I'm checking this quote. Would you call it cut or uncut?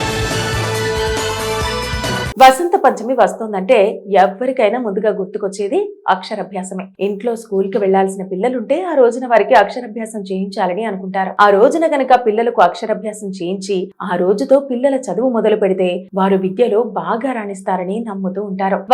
cut